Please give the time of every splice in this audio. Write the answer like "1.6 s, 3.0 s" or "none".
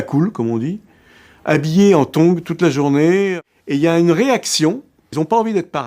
3.3 s, 5.1 s

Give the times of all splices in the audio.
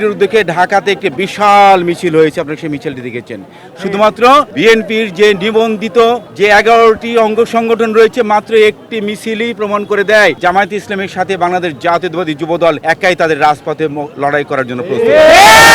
4.5 s, 6.3 s, 10.4 s, 12.8 s

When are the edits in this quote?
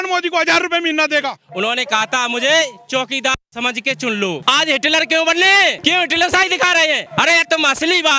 1.4 s, 4.4 s, 5.8 s, 7.1 s

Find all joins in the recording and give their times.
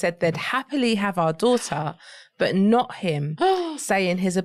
none

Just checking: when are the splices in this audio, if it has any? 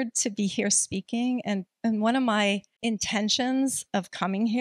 2.7 s

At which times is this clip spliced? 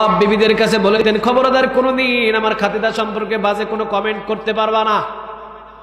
1.0 s

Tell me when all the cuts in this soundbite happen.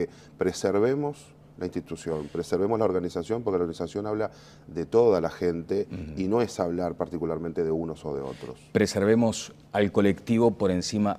8.1 s

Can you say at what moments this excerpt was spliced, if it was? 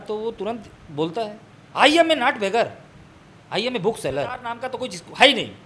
4.6 s

